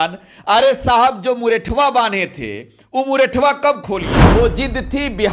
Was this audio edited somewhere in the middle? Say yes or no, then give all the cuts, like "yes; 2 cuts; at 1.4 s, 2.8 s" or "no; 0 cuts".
yes; 1 cut; at 4.2 s